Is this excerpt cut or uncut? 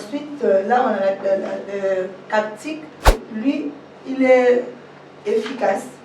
cut